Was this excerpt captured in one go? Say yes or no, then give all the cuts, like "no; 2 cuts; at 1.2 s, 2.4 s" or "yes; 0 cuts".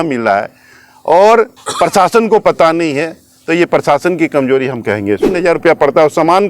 no; 1 cut; at 5.4 s